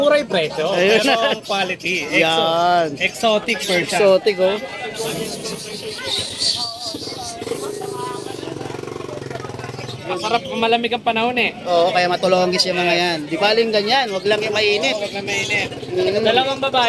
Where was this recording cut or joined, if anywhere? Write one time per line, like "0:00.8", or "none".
none